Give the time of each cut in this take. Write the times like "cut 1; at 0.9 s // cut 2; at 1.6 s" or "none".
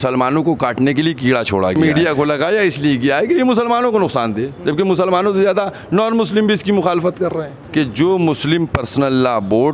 cut 1; at 1.8 s // cut 2; at 7.6 s

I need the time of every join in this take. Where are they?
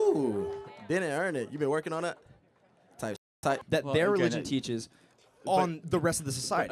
cut 1; at 3.6 s

